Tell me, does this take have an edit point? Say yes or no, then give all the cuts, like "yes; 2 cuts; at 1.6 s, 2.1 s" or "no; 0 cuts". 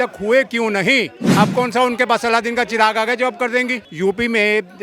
yes; 2 cuts; at 1.2 s, 3.9 s